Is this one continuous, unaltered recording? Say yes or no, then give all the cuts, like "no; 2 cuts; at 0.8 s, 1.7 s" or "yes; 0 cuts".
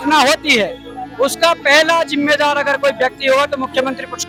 yes; 0 cuts